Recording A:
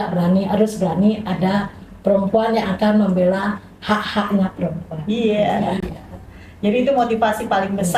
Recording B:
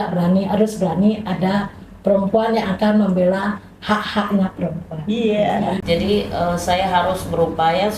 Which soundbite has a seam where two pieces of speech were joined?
B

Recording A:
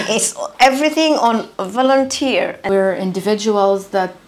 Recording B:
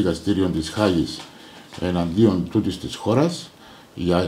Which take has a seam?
A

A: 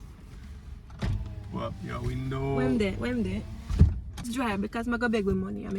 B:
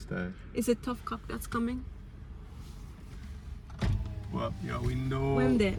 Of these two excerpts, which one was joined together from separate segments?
A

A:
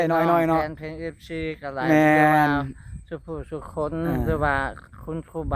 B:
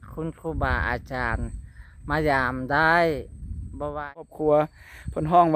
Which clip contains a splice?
B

